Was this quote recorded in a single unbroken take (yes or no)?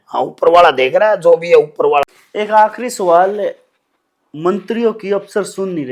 no